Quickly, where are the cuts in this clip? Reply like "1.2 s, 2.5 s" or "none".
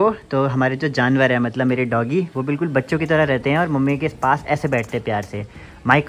none

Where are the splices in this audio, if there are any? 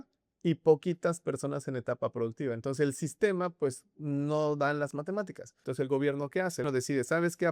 5.6 s, 6.6 s

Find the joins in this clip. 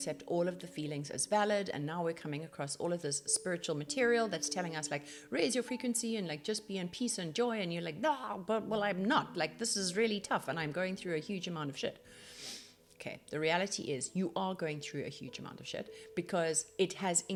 none

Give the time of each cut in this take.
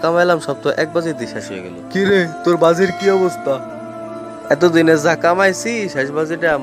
1.8 s

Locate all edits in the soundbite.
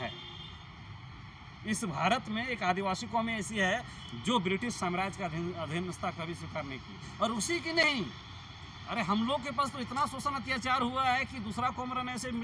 none

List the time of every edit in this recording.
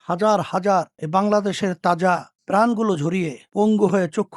3.4 s

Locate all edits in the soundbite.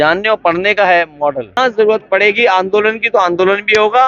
1.6 s

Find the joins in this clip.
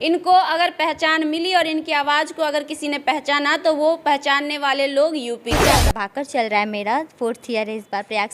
5.8 s

